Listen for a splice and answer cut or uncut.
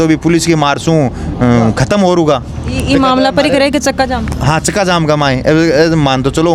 uncut